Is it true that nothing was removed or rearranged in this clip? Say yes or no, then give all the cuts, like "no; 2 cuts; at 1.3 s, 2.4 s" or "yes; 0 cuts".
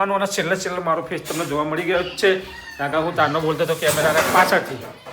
yes; 0 cuts